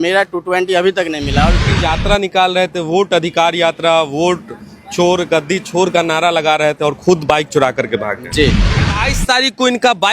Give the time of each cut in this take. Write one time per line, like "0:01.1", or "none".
0:01.7
0:08.7